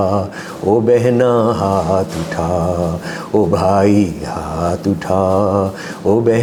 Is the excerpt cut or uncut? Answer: uncut